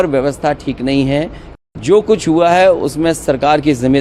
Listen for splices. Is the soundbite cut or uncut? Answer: cut